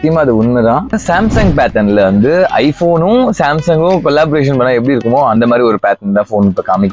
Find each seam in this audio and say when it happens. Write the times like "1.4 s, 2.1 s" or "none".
0.9 s

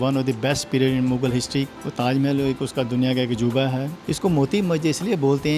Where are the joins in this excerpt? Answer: 1.7 s, 3.9 s

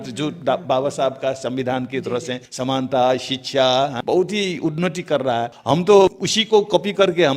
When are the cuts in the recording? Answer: 2.4 s, 4.0 s, 5.6 s, 6.3 s

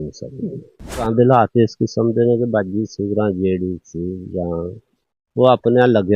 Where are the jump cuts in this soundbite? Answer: 1.1 s

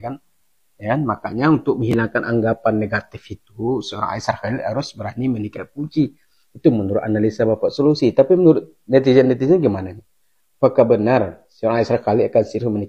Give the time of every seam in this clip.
none

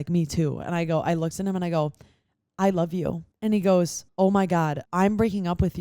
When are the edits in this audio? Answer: 3.3 s, 4.0 s, 4.8 s

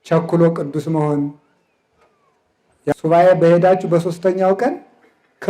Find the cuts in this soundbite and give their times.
2.9 s

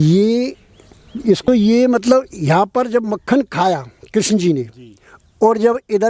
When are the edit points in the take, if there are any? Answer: 1.4 s

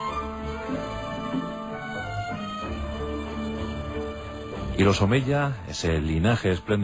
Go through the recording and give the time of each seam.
3.6 s

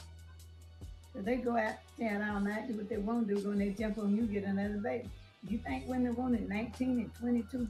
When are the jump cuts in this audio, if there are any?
none

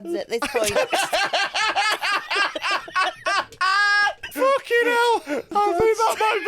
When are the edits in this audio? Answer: 4.3 s, 5.5 s

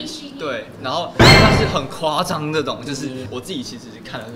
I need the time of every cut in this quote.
3.3 s

